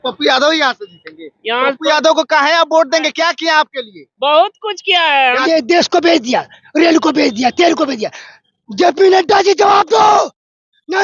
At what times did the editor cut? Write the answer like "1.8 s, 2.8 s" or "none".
5.4 s